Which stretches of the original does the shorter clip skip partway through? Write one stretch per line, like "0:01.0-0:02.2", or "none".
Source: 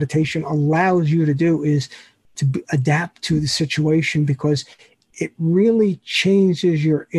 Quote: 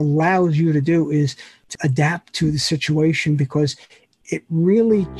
0:02.3-0:02.6

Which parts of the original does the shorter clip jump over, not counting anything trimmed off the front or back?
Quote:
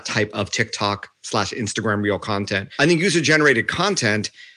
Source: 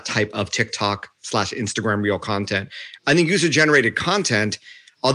0:02.7-0:03.0

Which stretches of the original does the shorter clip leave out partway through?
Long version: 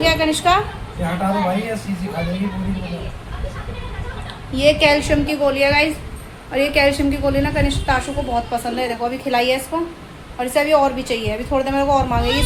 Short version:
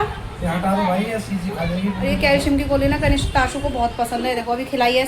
0:02.7-0:06.6

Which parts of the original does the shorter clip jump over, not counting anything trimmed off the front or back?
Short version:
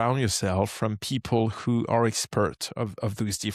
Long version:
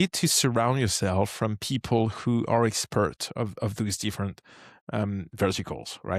none

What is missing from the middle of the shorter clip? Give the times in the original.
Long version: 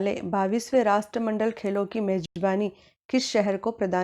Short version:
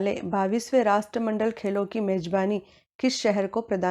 0:02.2-0:02.3

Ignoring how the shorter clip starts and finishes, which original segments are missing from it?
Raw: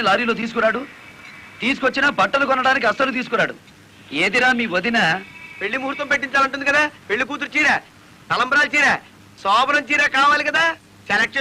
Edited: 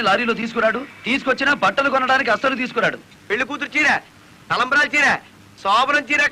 0:00.9-0:01.5
0:03.7-0:07.0

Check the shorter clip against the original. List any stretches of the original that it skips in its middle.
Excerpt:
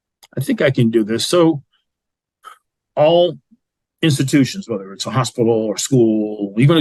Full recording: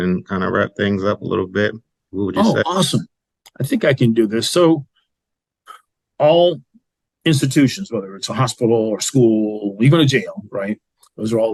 none

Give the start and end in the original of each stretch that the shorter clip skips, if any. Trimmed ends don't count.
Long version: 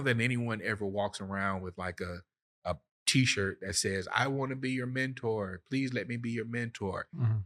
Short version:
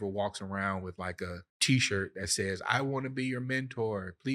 0:02.3-0:02.9

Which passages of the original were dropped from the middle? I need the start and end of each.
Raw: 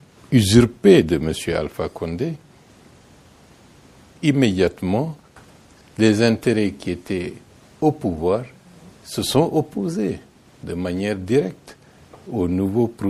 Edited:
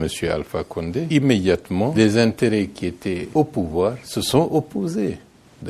0:02.3-0:04.2
0:04.8-0:05.7
0:07.3-0:07.7
0:08.6-0:09.1

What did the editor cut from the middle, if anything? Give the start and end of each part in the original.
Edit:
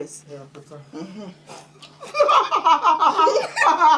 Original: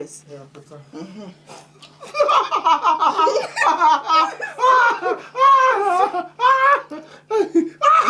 none

